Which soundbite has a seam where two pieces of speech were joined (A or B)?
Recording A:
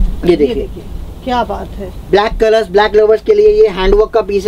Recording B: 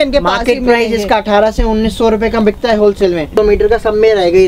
B